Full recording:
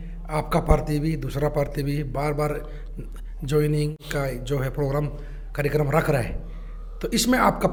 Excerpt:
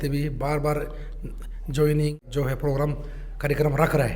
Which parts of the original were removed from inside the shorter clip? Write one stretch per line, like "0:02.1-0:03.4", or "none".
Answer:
0:04.0-0:04.4